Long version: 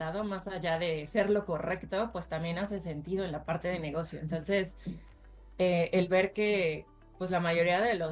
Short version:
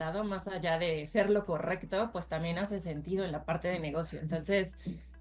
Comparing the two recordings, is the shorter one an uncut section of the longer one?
yes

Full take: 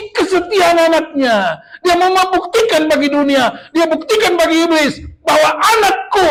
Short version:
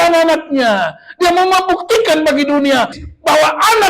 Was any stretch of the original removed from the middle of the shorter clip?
yes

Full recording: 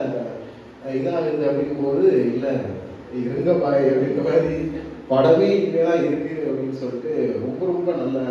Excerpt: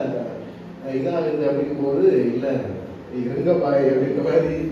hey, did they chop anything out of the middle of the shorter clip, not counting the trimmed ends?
no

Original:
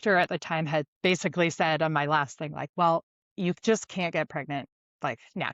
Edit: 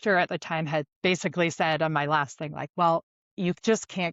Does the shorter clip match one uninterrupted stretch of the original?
yes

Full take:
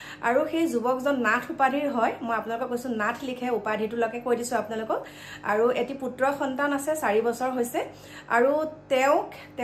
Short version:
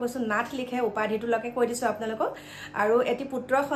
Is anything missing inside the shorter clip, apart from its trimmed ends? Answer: no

